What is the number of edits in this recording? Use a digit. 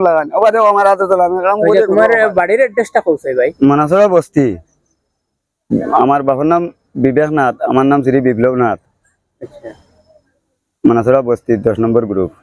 1